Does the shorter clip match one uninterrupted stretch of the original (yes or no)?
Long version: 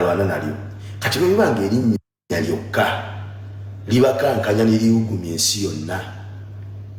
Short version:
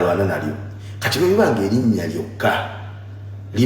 no